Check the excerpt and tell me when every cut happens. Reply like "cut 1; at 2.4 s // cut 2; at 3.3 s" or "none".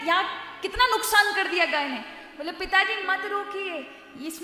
none